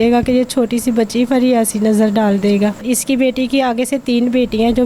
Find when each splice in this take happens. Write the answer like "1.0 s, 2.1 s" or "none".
2.8 s